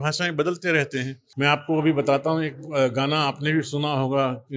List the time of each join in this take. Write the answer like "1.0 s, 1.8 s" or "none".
1.2 s